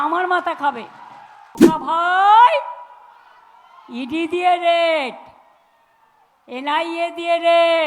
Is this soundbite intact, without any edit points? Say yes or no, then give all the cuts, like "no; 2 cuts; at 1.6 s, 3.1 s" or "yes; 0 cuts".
no; 1 cut; at 1.5 s